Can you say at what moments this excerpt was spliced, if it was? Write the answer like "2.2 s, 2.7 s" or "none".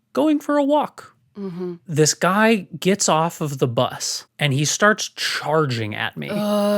1.8 s, 4.2 s